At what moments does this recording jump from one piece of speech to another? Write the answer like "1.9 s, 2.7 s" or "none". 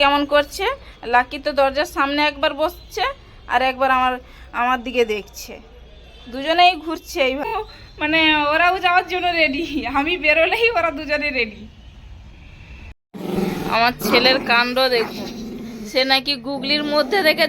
7.4 s, 13.4 s